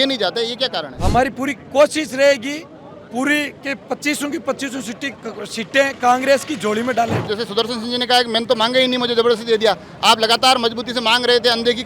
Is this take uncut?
no; 2 cuts; at 0.9 s, 7.2 s

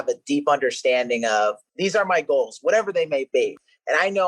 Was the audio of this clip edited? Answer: yes; 2 cuts; at 1.7 s, 3.4 s

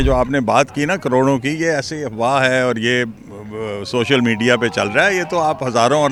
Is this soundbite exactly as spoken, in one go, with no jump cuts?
yes; 0 cuts

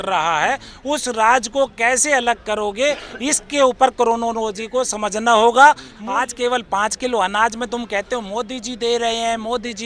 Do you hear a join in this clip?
yes; 1 cut; at 6.0 s

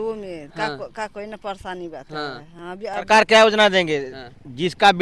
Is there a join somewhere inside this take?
yes; 1 cut; at 3.0 s

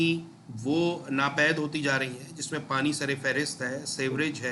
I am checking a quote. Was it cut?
no; 0 cuts

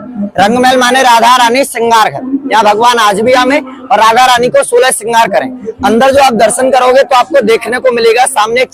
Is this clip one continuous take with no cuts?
yes; 0 cuts

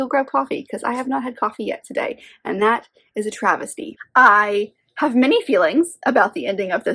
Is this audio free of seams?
no; 1 cut; at 3.9 s

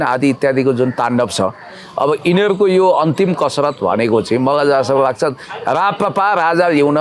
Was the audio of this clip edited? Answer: no; 0 cuts

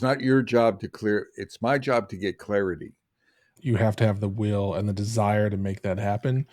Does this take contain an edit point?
yes; 1 cut; at 3.6 s

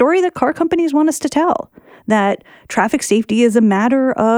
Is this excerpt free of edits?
yes; 0 cuts

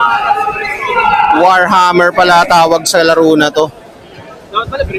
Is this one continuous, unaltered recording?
yes; 0 cuts

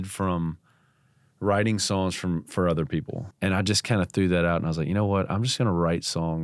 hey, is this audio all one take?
no; 1 cut; at 3.2 s

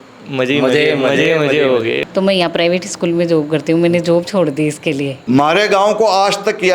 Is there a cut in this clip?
yes; 2 cuts; at 2.0 s, 5.1 s

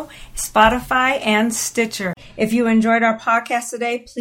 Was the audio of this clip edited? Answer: yes; 1 cut; at 2.2 s

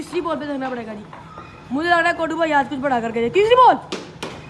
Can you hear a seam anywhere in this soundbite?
no; 0 cuts

